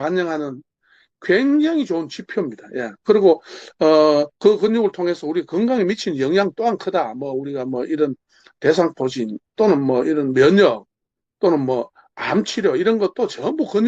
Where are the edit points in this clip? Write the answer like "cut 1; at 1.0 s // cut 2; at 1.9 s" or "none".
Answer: none

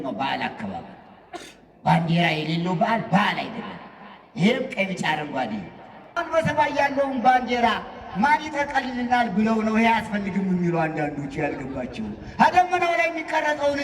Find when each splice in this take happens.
cut 1; at 6.2 s

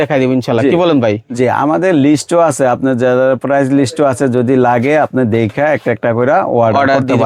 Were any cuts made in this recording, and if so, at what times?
none

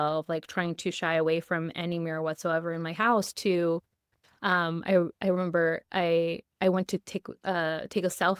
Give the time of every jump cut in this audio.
none

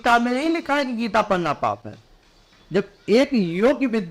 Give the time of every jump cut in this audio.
none

